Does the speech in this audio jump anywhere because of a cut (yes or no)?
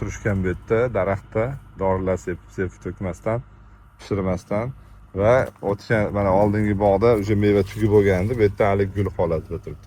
no